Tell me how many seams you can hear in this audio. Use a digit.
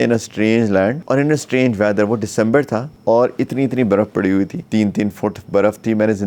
3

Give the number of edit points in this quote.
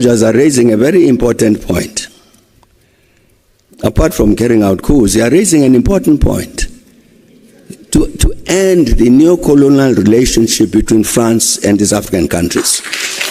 0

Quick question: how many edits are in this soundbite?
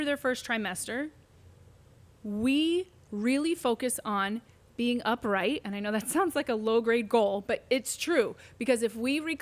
0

